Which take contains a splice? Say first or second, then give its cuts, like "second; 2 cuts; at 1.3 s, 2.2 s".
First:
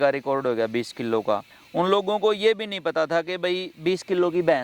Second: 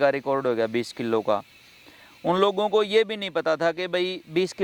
first; 1 cut; at 1.6 s